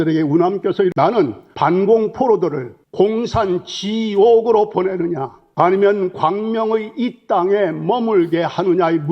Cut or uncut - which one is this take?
cut